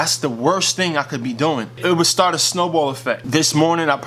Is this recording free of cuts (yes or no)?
no